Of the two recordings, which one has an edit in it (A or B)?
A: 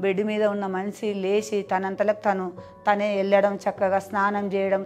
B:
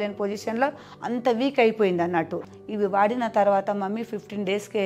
B